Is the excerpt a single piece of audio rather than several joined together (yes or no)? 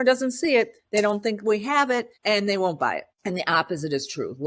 no